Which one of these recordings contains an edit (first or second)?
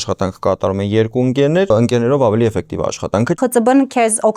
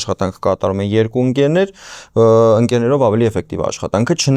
first